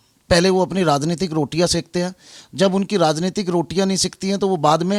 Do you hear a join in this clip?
no; 0 cuts

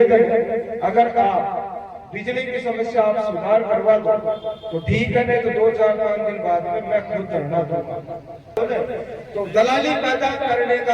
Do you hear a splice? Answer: yes; 1 cut; at 8.6 s

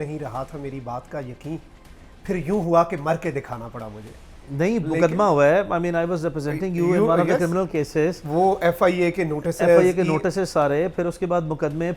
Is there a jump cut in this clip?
no; 0 cuts

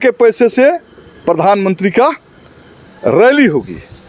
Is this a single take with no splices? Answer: yes; 0 cuts

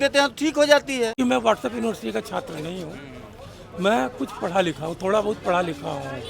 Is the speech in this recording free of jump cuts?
no; 1 cut; at 1.2 s

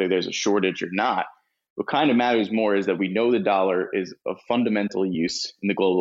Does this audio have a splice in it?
no; 0 cuts

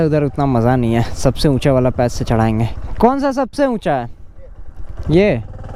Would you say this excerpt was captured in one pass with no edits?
yes; 0 cuts

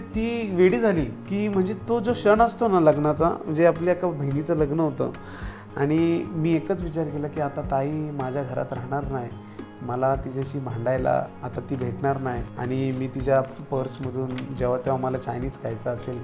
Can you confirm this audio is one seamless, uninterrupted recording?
yes; 0 cuts

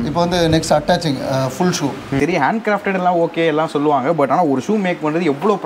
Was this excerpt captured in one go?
no; 1 cut; at 2.1 s

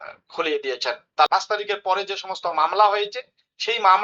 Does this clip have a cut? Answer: yes; 1 cut; at 1.3 s

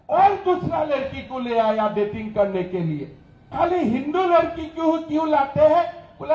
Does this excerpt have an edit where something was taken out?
yes; 1 cut; at 3.5 s

